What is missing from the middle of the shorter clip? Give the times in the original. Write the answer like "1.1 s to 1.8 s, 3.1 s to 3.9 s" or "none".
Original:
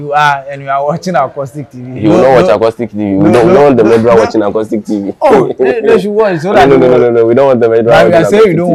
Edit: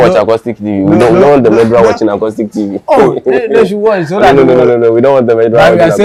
none